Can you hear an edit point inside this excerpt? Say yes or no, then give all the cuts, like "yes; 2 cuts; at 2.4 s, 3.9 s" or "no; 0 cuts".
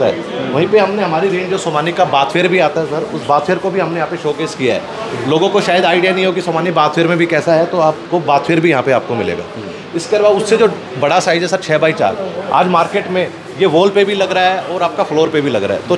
no; 0 cuts